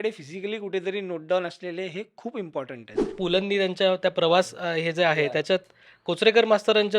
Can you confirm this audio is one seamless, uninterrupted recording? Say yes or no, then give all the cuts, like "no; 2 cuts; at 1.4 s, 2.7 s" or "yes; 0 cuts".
no; 1 cut; at 3.0 s